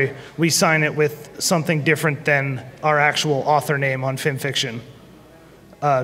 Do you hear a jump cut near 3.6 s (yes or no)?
yes